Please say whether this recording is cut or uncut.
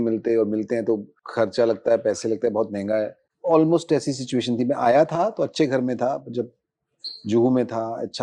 cut